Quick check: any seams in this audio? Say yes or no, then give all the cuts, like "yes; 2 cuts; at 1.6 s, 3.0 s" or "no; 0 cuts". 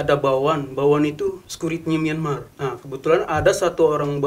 yes; 2 cuts; at 1.5 s, 2.5 s